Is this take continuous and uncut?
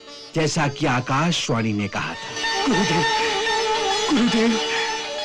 no; 1 cut; at 2.3 s

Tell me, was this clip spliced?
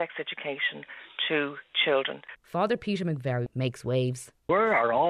yes; 2 cuts; at 2.3 s, 3.9 s

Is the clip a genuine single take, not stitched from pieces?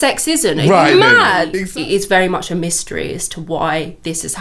no; 1 cut; at 1.5 s

